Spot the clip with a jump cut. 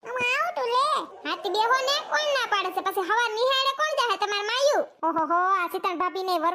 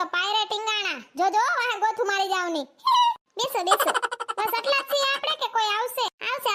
first; 1 cut; at 4.9 s

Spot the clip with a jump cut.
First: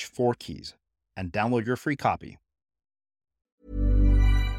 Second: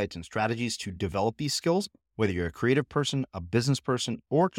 first; 1 cut; at 3.6 s

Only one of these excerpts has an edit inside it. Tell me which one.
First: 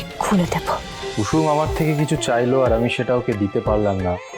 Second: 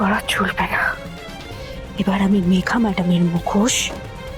first; 1 cut; at 1.0 s

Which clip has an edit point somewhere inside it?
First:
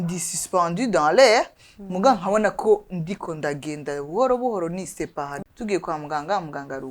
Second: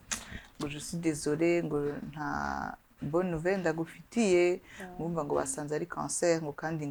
first; 1 cut; at 5.4 s

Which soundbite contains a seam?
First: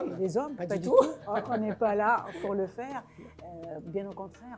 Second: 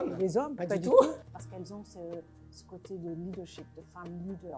second; 1 cut; at 1.2 s

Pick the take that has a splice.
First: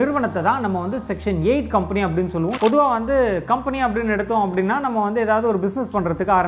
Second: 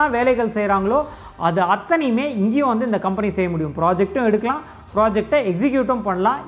first; 1 cut; at 2.5 s

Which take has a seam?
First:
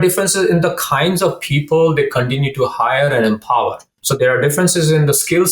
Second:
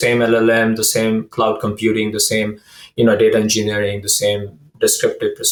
first; 1 cut; at 4.0 s

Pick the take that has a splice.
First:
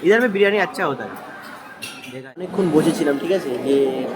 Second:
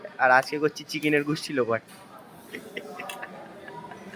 first; 1 cut; at 2.0 s

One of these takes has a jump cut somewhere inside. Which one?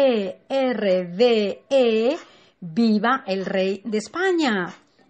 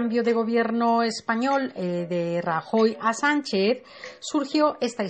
second; 1 cut; at 1.1 s

